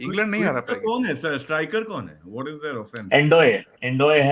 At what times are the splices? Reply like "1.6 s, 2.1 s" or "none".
none